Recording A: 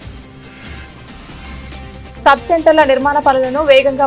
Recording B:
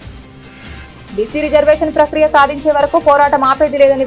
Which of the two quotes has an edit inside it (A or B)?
A